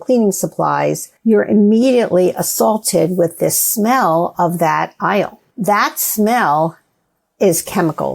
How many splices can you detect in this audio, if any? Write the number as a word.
two